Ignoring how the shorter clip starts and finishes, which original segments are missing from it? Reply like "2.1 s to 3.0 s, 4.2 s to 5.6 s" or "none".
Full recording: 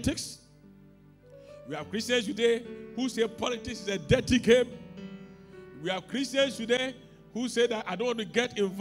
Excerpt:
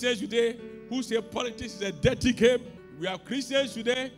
4.9 s to 5.6 s